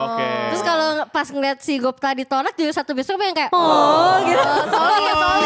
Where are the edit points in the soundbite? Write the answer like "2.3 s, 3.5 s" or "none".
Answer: none